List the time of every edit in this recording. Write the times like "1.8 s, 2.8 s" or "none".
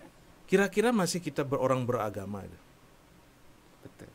none

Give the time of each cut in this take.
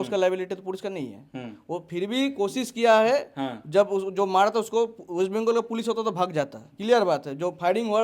none

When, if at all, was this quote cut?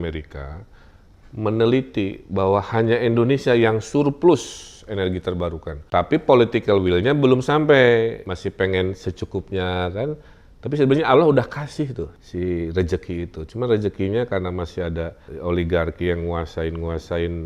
5.9 s, 8.3 s, 12.2 s, 15.2 s

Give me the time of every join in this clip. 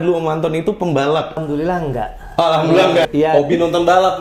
1.4 s, 3.0 s

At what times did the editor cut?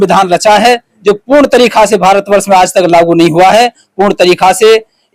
none

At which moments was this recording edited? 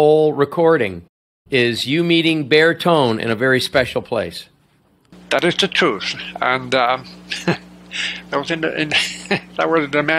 none

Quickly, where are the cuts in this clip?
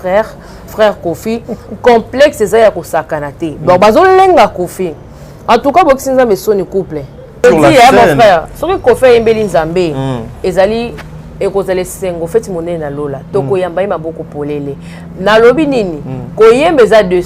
7.4 s

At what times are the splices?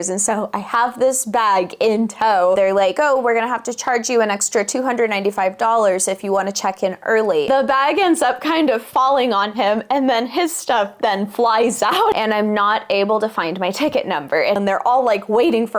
2.6 s, 7.5 s, 12.1 s, 14.6 s

